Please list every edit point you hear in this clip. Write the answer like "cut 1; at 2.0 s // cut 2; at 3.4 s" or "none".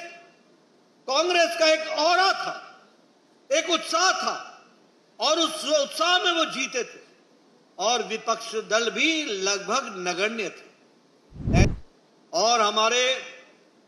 cut 1; at 11.6 s